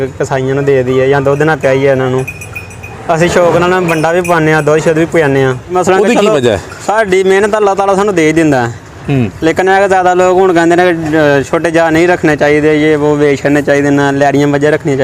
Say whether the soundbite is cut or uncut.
cut